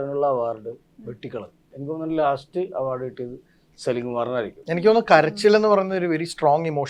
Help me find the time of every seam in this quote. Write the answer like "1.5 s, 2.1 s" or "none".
1.7 s, 4.6 s